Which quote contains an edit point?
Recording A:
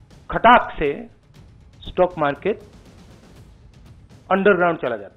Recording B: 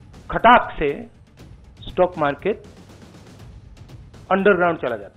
B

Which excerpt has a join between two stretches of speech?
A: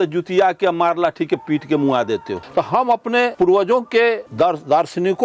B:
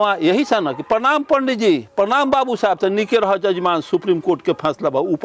A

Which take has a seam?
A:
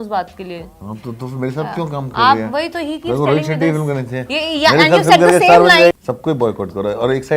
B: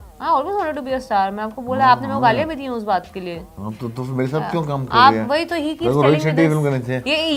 A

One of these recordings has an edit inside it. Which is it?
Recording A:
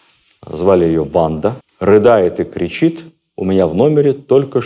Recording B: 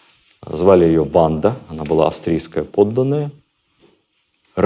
A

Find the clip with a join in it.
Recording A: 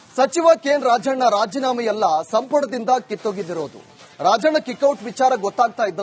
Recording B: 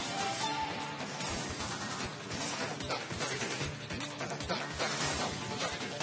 B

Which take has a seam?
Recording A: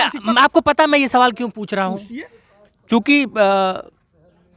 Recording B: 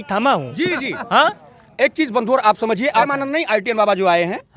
B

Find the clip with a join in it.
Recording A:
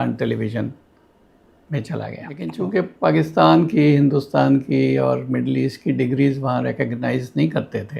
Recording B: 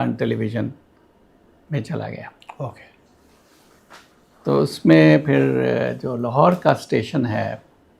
A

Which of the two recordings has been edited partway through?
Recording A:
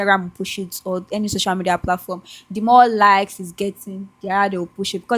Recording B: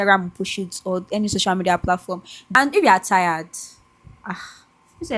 B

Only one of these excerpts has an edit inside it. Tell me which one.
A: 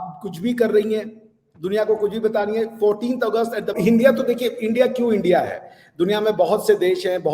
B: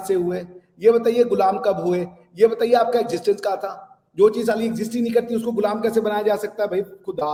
A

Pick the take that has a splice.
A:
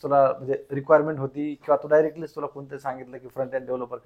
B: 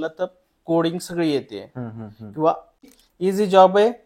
B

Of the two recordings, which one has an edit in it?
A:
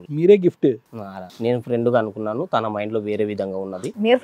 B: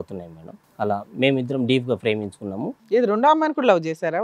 A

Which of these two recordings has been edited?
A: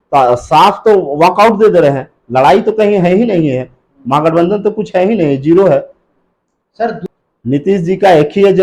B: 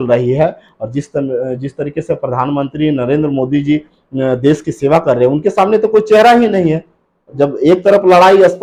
A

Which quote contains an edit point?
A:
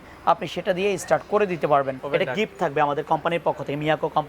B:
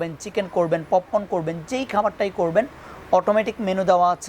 A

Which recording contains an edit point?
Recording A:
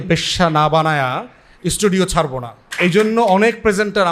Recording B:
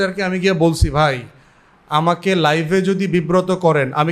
A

